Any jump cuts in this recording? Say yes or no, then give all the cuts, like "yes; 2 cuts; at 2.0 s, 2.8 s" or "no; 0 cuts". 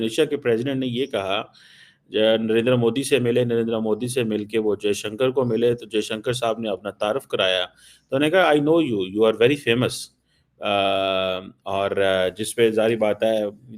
no; 0 cuts